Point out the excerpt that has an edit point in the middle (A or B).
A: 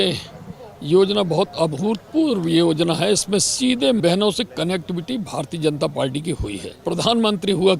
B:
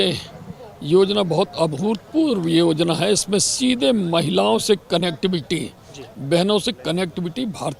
A